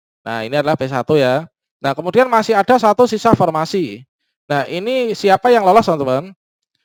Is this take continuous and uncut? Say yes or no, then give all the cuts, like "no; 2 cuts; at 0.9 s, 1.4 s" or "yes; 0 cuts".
yes; 0 cuts